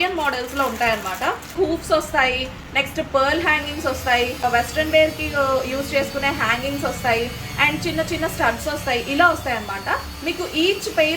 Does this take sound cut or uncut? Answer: cut